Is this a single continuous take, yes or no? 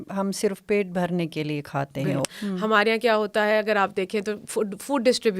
no